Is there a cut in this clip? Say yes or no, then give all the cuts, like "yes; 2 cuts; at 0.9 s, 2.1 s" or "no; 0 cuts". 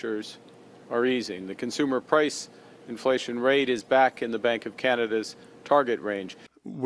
no; 0 cuts